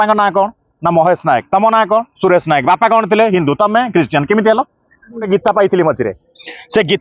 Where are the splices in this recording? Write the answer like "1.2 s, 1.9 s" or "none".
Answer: 5.3 s